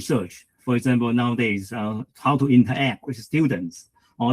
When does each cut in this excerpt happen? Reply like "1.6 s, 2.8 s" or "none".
none